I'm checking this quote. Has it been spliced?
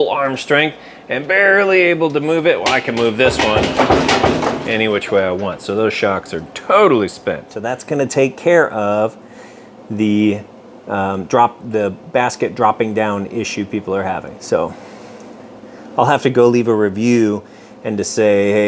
yes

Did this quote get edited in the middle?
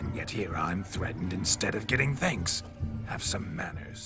no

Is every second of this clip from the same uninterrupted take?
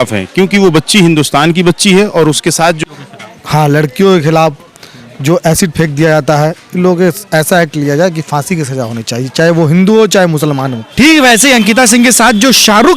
no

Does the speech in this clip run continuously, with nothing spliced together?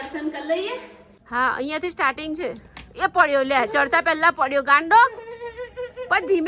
no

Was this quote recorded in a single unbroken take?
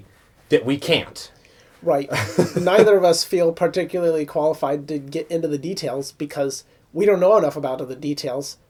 yes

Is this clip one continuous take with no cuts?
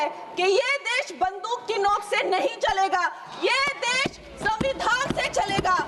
yes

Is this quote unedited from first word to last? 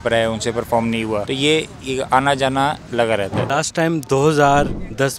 no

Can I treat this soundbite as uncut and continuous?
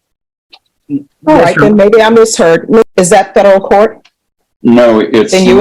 no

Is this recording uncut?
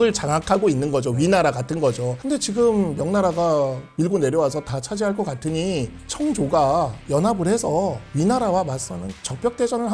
no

